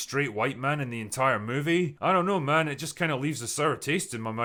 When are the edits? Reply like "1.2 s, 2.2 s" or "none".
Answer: none